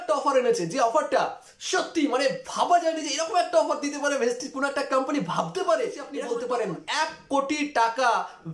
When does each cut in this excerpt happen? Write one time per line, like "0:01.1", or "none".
0:06.1